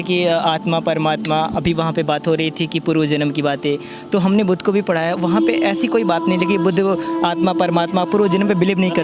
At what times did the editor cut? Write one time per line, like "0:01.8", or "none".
none